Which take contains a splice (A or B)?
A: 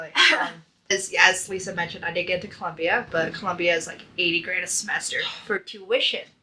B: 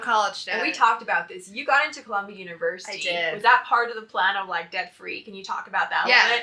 A